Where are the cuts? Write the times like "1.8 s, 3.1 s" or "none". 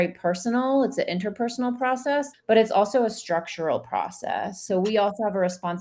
2.3 s, 4.6 s